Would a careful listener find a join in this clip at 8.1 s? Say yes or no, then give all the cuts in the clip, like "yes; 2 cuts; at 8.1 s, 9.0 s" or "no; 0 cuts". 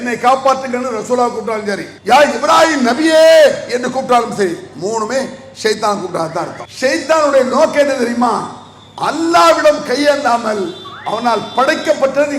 no; 2 cuts; at 1.9 s, 6.6 s